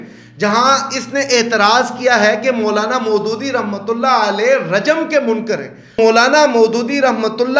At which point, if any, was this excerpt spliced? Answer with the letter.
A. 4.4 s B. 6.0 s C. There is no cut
B